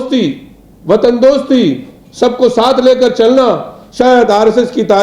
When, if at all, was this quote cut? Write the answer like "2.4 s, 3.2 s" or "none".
none